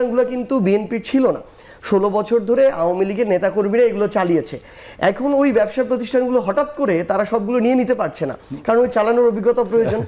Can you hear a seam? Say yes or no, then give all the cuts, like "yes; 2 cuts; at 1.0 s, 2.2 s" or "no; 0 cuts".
no; 0 cuts